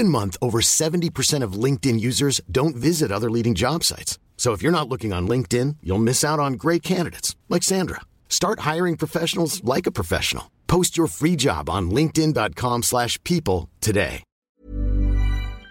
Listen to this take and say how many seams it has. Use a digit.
1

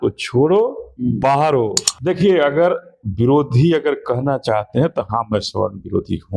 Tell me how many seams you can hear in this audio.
1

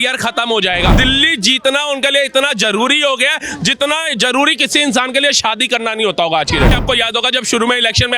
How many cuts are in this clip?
2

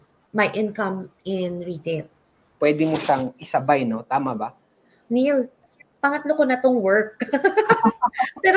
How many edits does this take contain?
1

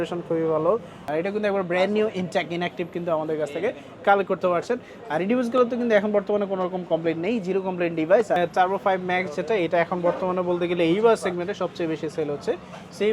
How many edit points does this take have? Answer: 2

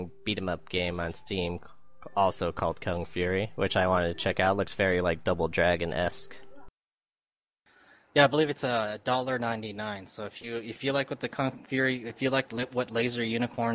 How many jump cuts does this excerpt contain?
1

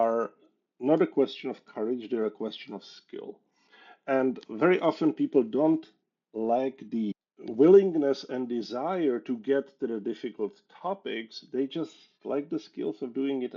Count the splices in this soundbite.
1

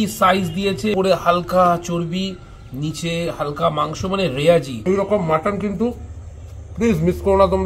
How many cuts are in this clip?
2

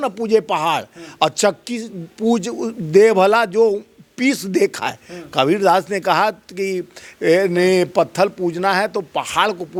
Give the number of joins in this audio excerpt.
0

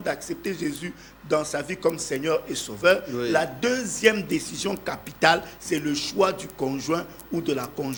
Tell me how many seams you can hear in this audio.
0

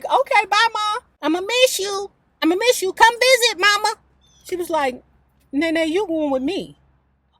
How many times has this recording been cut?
2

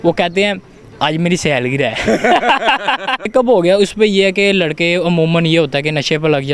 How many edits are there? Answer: 1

